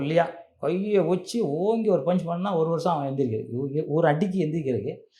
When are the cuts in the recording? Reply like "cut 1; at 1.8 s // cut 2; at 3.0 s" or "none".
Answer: none

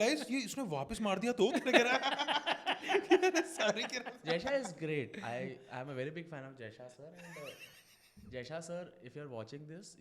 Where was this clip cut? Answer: none

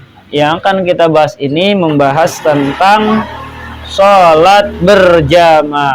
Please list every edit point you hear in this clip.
none

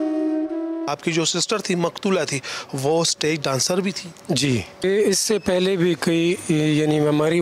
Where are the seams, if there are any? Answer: cut 1; at 0.9 s // cut 2; at 4.8 s

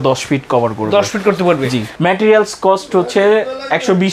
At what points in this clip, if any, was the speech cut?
cut 1; at 1.9 s

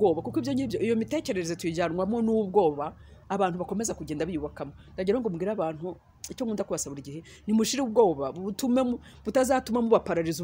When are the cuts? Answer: none

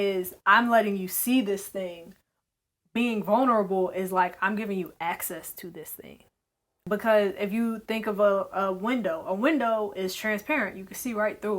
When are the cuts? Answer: cut 1; at 6.8 s

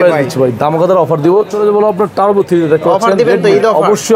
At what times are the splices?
cut 1; at 1.5 s

